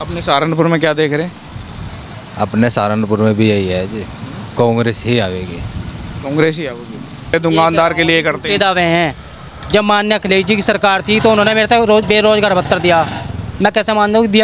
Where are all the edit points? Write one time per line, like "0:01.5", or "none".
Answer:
0:07.3